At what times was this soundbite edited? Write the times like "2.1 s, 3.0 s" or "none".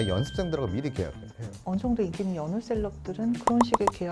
1.6 s